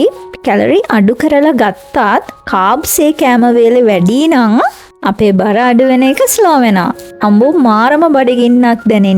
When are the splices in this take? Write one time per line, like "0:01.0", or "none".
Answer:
0:07.1